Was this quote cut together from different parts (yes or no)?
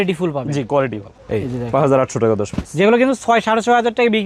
no